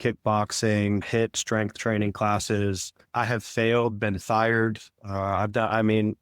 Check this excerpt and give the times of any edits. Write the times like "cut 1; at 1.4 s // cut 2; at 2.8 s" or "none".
cut 1; at 1.0 s // cut 2; at 3.1 s